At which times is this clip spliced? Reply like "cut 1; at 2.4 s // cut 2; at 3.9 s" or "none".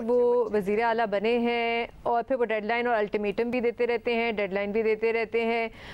none